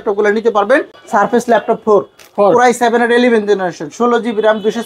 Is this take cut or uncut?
cut